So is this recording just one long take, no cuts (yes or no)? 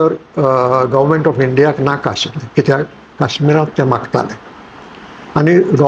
yes